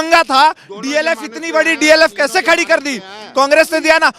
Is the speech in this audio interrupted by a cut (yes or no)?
no